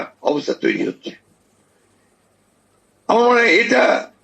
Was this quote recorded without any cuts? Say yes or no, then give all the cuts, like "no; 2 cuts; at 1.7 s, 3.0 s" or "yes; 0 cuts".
yes; 0 cuts